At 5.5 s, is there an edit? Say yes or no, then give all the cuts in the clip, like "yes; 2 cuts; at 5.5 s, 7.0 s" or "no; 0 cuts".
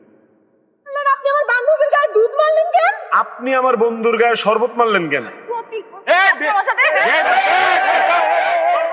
yes; 2 cuts; at 1.0 s, 5.5 s